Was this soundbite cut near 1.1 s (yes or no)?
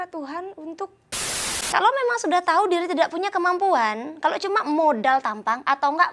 yes